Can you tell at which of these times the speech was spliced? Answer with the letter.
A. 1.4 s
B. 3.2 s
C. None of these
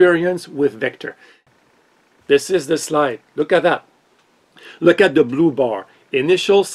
A